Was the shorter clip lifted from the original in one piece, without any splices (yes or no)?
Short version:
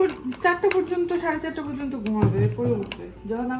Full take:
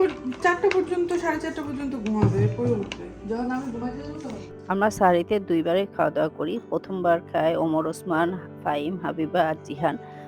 yes